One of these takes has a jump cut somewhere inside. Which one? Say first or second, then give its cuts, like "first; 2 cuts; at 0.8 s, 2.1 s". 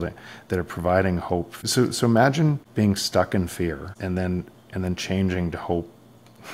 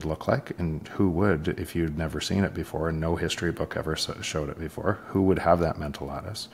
first; 3 cuts; at 1.7 s, 2.6 s, 3.9 s